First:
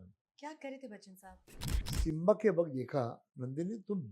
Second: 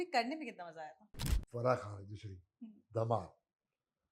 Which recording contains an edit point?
first; 1 cut; at 1.8 s

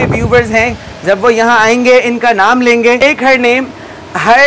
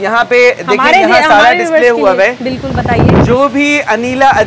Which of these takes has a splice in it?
first; 1 cut; at 3.0 s

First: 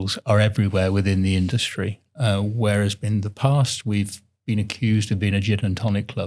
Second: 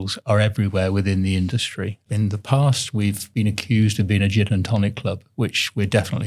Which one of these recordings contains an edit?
second; 2 cuts; at 2.1 s, 3.2 s

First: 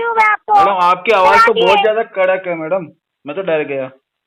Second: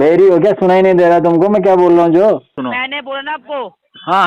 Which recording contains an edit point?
second; 1 cut; at 2.5 s

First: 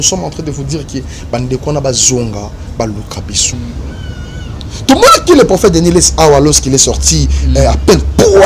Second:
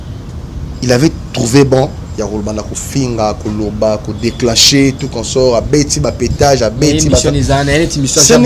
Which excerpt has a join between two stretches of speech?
first; 1 cut; at 3.5 s

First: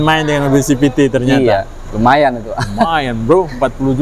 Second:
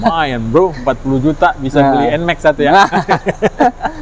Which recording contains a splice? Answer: first; 1 cut; at 1.8 s

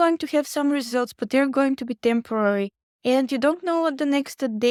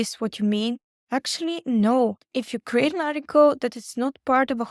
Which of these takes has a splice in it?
second; 1 cut; at 2.2 s

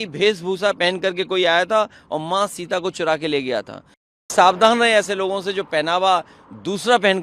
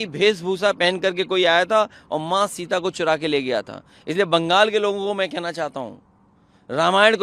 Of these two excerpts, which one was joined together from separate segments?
first; 1 cut; at 4.3 s

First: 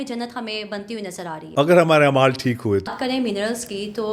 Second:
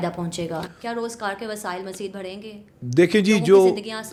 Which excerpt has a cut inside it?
first; 2 cuts; at 1.4 s, 2.9 s

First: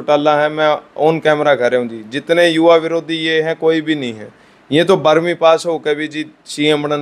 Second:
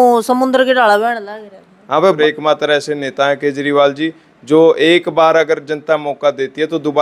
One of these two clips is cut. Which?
second; 1 cut; at 2.2 s

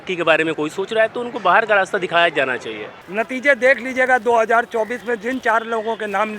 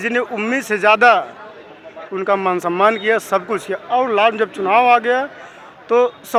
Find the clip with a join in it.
first; 1 cut; at 2.9 s

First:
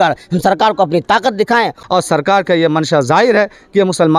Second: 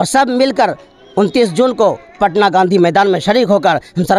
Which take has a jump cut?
first; 1 cut; at 1.8 s

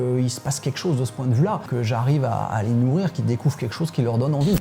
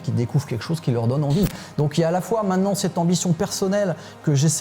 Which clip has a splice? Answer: first; 1 cut; at 1.7 s

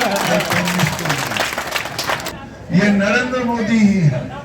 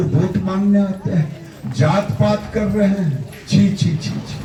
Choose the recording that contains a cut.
first; 1 cut; at 2.3 s

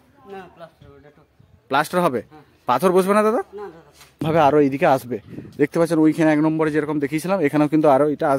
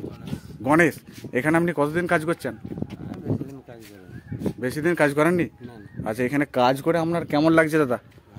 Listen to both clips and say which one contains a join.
first; 1 cut; at 4.2 s

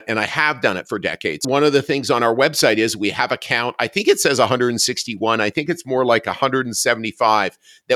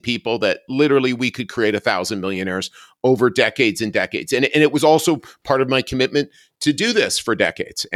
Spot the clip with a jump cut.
first; 1 cut; at 1.4 s

